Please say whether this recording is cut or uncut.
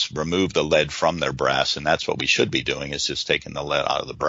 uncut